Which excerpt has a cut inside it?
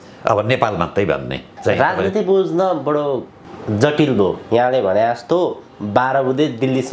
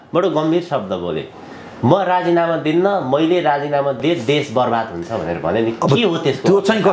first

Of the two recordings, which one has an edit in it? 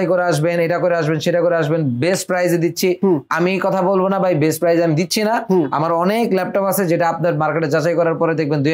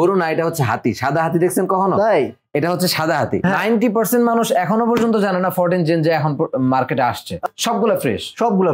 second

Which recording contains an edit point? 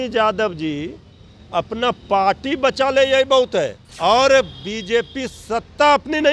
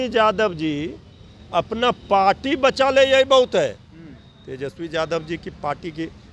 first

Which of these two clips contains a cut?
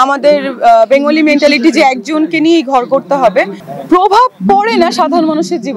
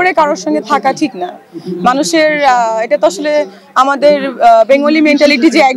first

